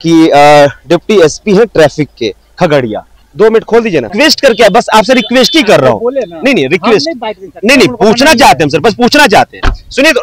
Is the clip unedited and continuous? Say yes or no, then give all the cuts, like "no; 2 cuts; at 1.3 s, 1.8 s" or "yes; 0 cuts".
no; 2 cuts; at 3.2 s, 4.1 s